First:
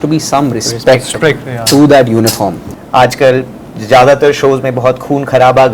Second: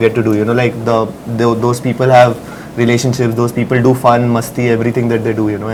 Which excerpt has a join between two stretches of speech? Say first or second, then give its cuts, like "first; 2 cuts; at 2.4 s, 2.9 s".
first; 1 cut; at 2.6 s